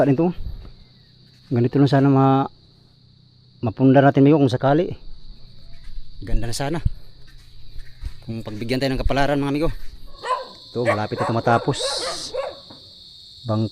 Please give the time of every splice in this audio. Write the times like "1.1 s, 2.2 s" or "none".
10.2 s